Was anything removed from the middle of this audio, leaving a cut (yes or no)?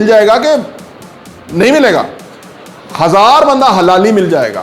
no